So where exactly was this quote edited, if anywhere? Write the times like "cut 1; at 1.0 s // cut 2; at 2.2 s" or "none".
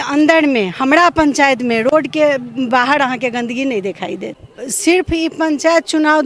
cut 1; at 4.5 s